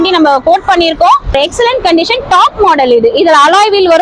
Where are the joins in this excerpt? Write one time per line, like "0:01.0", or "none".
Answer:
0:01.3